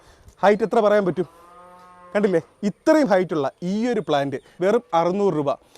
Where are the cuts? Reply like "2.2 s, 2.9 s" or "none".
4.4 s